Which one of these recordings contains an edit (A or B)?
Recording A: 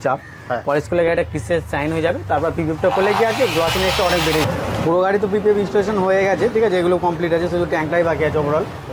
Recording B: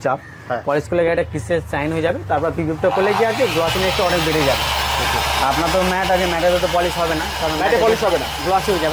A